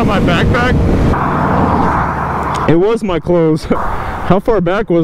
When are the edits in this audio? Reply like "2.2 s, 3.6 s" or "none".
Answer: 1.1 s